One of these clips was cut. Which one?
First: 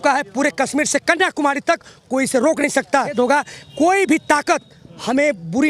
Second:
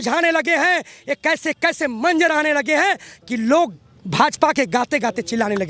first; 1 cut; at 3.1 s

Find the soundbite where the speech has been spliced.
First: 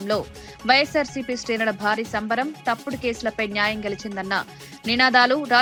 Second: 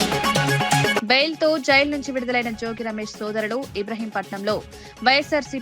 second; 1 cut; at 1.0 s

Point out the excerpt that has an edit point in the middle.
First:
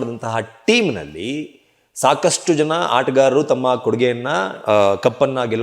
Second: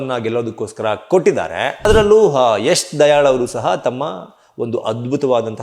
second; 1 cut; at 1.8 s

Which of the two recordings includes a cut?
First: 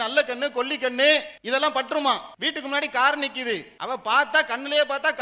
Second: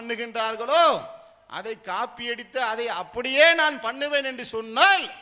first; 3 cuts; at 1.4 s, 2.3 s, 3.7 s

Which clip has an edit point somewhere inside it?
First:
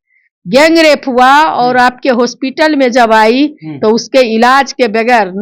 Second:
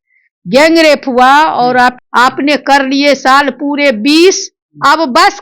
second; 1 cut; at 2.0 s

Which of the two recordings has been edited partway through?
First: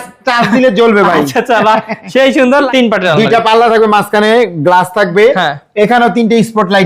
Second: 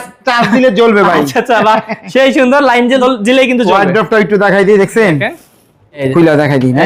first; 1 cut; at 2.7 s

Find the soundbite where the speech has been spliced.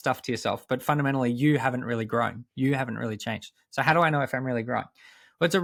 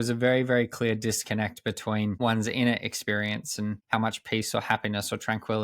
second; 2 cuts; at 2.2 s, 3.8 s

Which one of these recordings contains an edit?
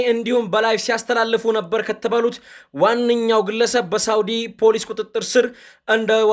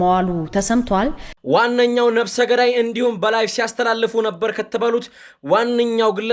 second; 1 cut; at 1.3 s

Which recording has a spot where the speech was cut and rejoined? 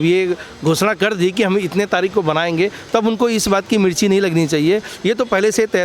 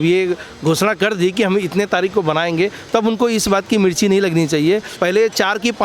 second; 1 cut; at 4.9 s

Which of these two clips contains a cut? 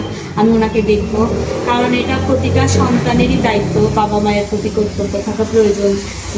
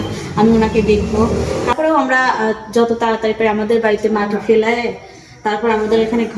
second; 1 cut; at 1.7 s

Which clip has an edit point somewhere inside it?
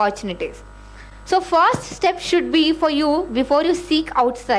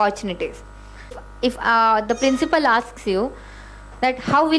second; 1 cut; at 1.2 s

